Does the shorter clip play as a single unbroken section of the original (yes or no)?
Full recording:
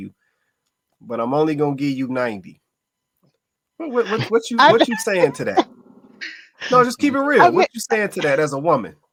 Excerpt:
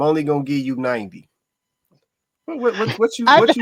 yes